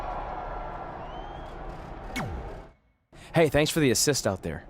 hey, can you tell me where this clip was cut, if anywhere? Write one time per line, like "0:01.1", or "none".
0:02.7